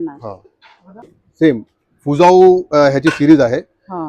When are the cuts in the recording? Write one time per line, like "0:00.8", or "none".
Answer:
0:01.0